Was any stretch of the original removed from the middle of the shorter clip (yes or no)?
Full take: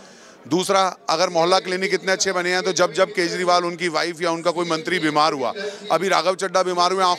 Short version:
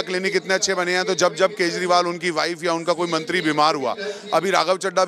no